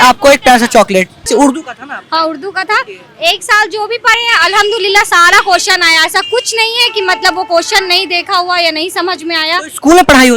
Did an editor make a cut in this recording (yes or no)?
no